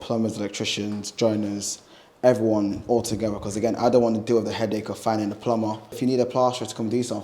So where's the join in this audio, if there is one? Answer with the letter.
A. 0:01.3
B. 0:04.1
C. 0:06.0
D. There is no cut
C